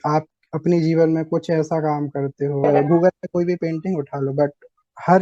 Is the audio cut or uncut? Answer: cut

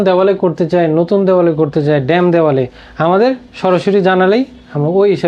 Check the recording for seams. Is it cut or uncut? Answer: uncut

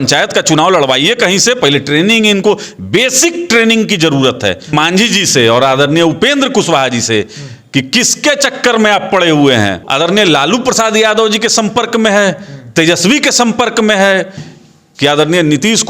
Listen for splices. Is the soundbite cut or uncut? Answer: cut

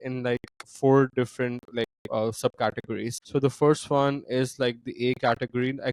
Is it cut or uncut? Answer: cut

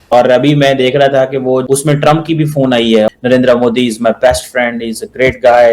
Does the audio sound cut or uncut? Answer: cut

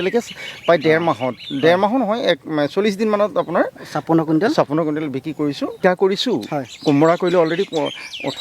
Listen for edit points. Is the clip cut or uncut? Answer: cut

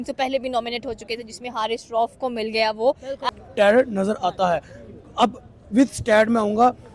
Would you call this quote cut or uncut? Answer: cut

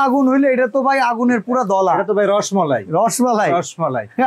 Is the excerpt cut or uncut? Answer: uncut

